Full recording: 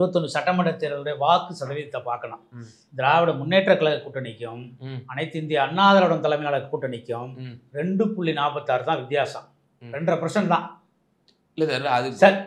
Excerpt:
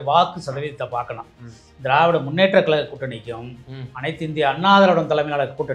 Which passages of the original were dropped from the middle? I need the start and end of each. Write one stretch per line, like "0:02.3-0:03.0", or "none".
none